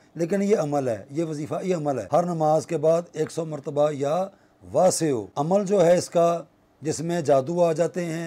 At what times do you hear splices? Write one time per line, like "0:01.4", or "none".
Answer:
0:02.0
0:05.3